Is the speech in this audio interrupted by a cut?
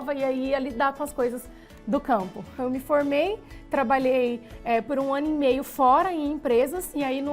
yes; 1 cut; at 2.5 s

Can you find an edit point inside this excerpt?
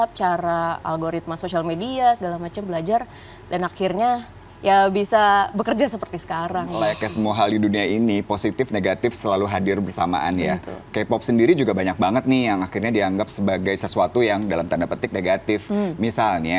yes; 1 cut; at 6.7 s

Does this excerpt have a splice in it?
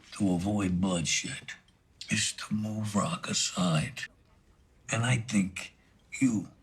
no; 0 cuts

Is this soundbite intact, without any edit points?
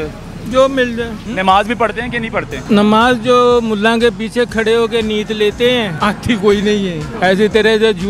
no; 4 cuts; at 1.2 s, 2.6 s, 5.9 s, 7.1 s

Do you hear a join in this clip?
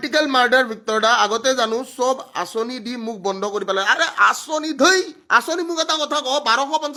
no; 0 cuts

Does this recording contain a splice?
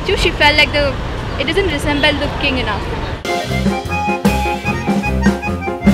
yes; 1 cut; at 3.1 s

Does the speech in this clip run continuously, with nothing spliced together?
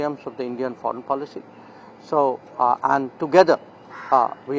yes; 0 cuts

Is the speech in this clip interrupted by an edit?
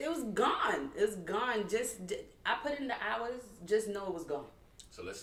no; 0 cuts

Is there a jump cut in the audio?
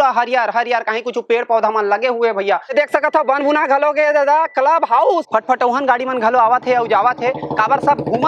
yes; 2 cuts; at 2.7 s, 5.2 s

